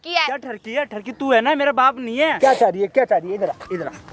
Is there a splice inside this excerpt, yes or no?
yes